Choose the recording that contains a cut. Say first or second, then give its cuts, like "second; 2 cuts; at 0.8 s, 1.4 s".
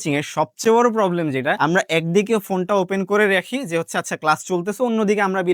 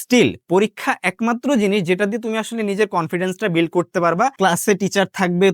second; 1 cut; at 4.3 s